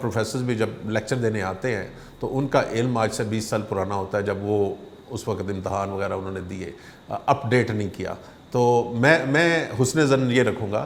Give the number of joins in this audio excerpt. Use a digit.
0